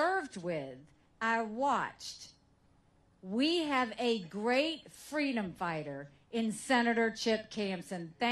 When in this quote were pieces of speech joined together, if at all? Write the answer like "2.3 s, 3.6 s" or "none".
1.9 s, 7.0 s

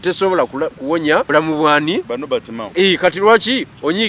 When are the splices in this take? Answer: 1.3 s, 2.1 s

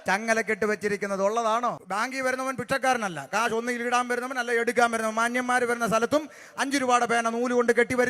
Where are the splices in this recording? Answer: 1.8 s

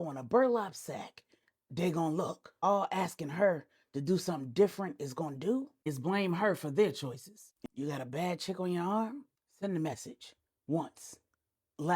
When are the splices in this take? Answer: 7.5 s

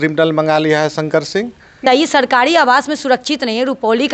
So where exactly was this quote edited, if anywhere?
1.8 s

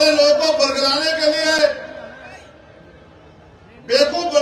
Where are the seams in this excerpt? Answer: none

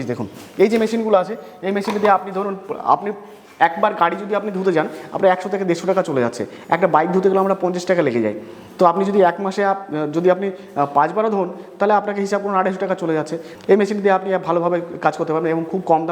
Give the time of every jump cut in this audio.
none

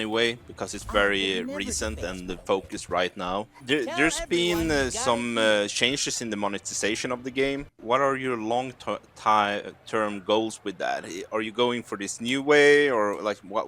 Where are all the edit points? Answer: 3.5 s, 7.8 s

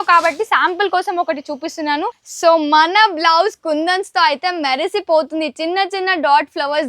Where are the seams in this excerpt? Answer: 2.2 s

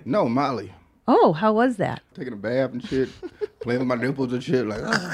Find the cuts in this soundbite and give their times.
2.1 s

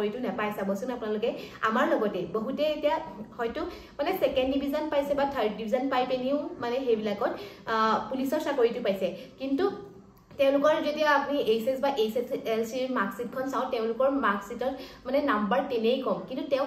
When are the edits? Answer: none

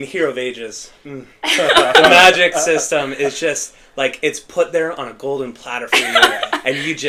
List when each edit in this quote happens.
none

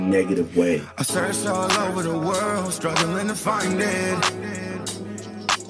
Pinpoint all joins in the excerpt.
1.0 s

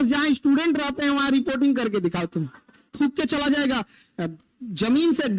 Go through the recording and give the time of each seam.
2.9 s

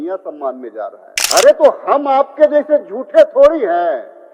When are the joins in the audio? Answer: 1.1 s

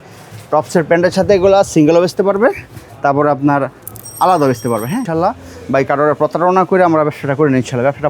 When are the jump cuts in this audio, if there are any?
5.1 s

